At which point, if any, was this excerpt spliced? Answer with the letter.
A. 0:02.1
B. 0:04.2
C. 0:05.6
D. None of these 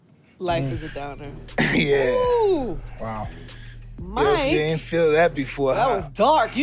D